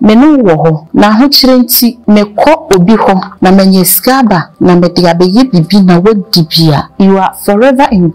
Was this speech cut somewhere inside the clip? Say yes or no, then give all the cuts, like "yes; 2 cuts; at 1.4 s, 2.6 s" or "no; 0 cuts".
yes; 5 cuts; at 0.8 s, 2.0 s, 3.3 s, 4.5 s, 6.9 s